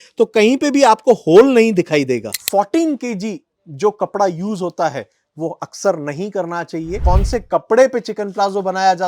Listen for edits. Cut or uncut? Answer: cut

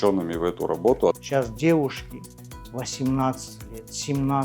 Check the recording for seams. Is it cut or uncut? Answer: cut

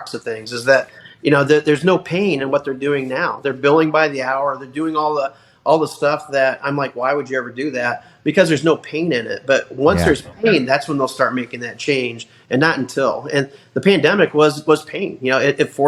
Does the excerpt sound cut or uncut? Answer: uncut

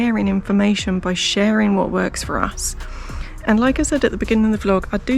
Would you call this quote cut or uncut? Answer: uncut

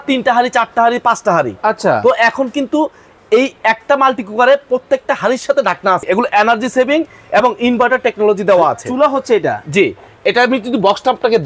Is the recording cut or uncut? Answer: cut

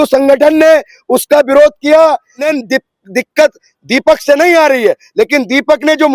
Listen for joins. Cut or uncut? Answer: cut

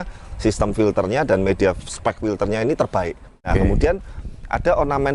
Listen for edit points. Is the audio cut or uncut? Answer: cut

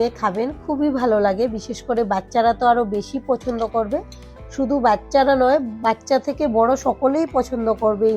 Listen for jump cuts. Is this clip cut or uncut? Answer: uncut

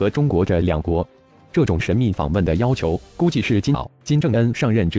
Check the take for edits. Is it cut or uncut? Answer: uncut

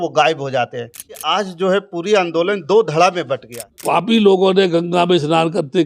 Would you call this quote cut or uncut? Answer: cut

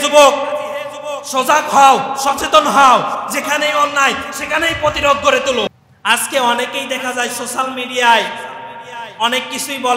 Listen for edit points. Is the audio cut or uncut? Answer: cut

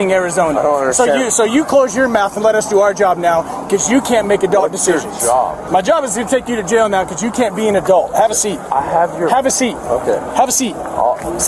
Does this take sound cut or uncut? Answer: uncut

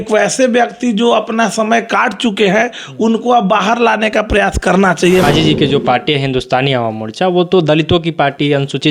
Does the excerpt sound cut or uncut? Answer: cut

